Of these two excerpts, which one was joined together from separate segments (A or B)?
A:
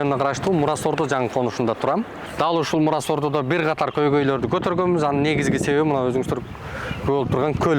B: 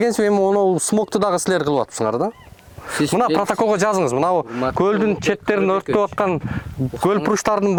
A